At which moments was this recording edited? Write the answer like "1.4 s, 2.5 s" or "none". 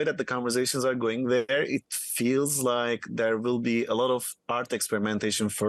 none